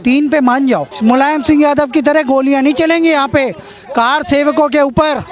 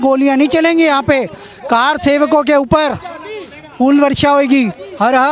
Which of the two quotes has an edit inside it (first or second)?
first